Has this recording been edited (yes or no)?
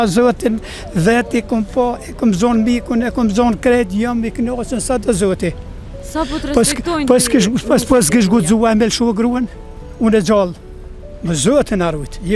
no